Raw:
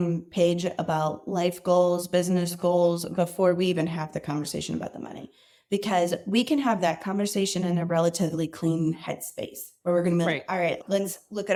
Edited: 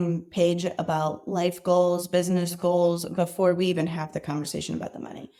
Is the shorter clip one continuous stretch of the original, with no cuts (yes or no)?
yes